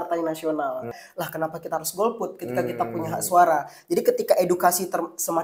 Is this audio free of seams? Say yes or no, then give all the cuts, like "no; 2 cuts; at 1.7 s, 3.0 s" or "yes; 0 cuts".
no; 1 cut; at 1.0 s